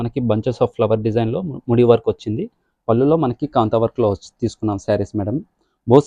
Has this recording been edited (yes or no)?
no